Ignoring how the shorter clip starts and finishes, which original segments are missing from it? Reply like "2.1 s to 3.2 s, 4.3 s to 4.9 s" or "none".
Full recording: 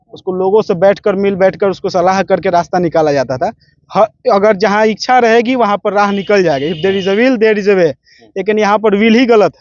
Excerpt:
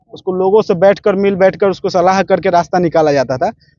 none